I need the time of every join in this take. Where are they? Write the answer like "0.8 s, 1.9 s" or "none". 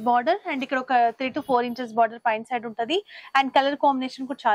none